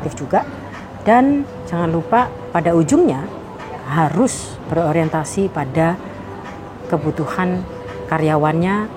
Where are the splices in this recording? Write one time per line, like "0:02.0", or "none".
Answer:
none

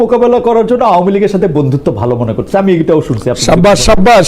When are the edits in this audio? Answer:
none

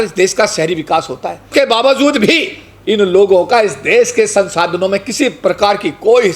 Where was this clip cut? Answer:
0:01.5

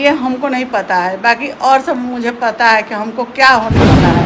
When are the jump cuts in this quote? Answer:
none

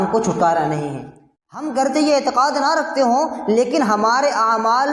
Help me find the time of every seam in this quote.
0:01.7

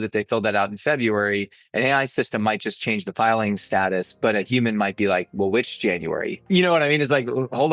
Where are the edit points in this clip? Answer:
0:06.4

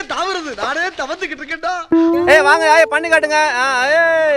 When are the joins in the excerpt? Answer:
0:02.3

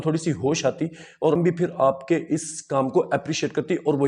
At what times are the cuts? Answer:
0:01.4

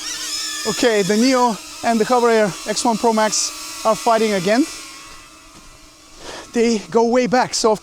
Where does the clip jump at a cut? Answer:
none

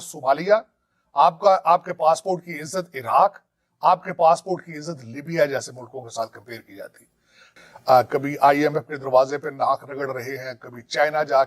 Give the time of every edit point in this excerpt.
0:07.5

